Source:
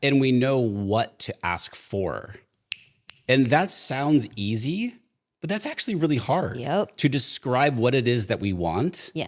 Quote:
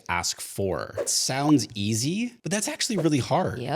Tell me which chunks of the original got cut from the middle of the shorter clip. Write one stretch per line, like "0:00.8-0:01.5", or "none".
0:02.6-0:03.8
0:05.0-0:05.4